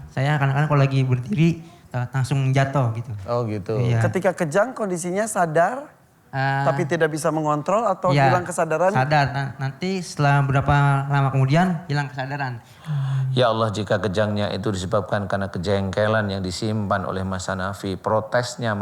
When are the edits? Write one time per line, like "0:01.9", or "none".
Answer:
0:12.7